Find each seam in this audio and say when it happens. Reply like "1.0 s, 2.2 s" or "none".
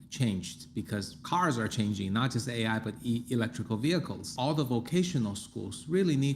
4.3 s